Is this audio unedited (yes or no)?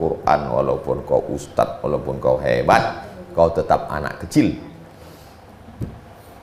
yes